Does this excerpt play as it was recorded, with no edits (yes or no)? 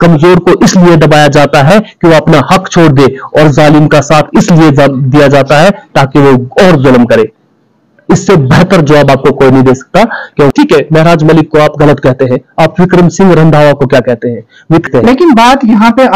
no